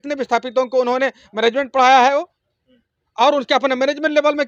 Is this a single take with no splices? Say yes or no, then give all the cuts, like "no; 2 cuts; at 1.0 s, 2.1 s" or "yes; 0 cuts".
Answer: yes; 0 cuts